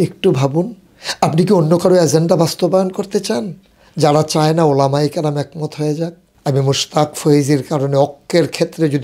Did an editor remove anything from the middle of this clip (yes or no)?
yes